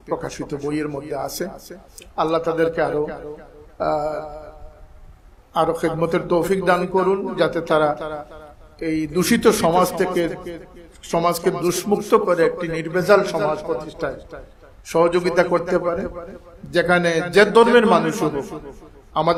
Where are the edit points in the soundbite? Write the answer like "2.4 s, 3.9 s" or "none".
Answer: none